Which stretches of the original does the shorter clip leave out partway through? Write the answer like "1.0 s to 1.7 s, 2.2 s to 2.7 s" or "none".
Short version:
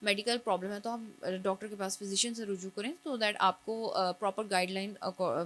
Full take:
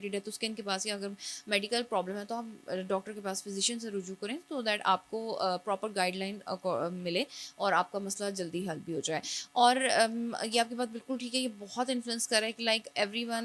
none